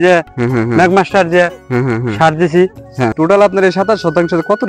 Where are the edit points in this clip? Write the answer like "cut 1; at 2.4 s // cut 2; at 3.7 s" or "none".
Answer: cut 1; at 3.1 s